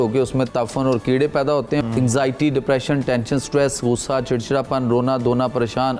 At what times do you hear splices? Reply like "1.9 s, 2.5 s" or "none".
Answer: 1.8 s